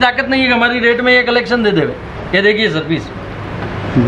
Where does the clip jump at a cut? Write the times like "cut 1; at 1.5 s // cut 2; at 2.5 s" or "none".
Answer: none